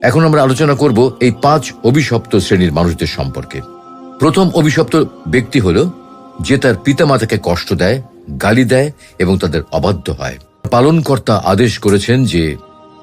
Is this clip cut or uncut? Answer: cut